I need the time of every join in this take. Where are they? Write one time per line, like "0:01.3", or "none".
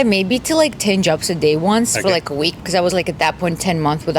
0:02.6

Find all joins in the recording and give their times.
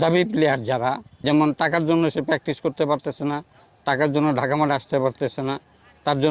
0:01.1

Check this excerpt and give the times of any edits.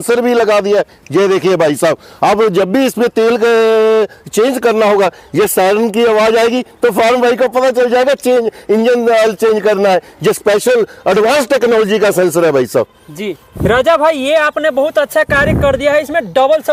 none

